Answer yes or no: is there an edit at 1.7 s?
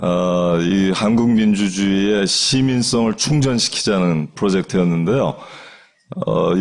no